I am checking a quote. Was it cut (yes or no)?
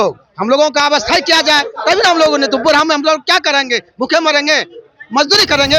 no